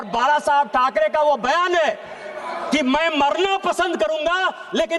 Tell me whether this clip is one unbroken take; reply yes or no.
yes